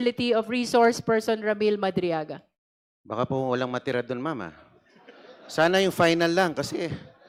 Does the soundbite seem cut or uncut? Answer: uncut